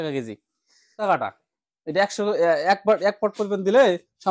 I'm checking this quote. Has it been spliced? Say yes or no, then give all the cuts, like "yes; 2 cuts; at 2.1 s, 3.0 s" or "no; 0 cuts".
yes; 1 cut; at 0.9 s